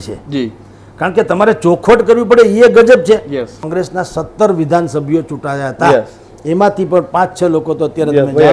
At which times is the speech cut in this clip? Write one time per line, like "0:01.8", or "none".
0:03.6